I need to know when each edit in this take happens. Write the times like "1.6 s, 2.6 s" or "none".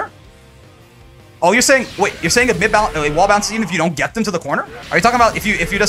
4.8 s